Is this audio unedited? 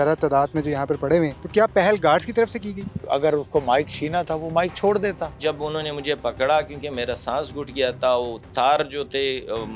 no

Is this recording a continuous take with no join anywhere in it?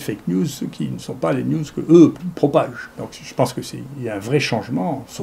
yes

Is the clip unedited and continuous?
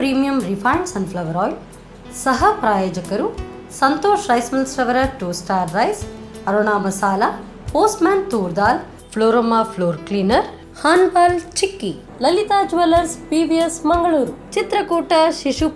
yes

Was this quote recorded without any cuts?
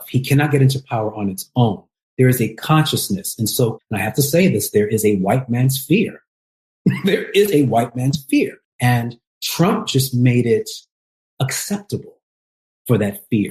no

